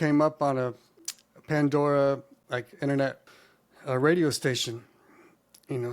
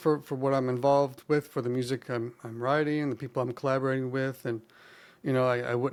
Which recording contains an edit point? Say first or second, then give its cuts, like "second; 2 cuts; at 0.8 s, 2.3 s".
first; 1 cut; at 3.3 s